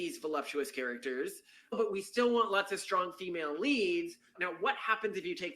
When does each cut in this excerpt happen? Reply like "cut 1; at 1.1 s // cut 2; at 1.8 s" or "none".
cut 1; at 1.7 s // cut 2; at 4.4 s